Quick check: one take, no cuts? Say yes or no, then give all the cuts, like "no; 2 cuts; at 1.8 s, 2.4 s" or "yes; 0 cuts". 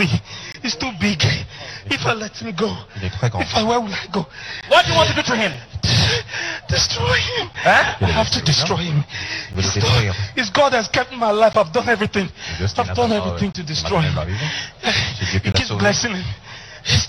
yes; 0 cuts